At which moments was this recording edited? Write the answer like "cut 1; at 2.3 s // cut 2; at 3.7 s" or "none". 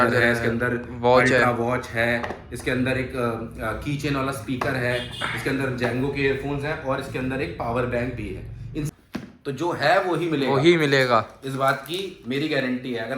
cut 1; at 8.9 s